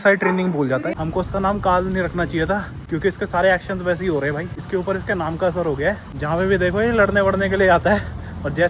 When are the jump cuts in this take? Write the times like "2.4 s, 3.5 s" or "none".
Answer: 1.0 s, 2.7 s, 4.6 s, 6.1 s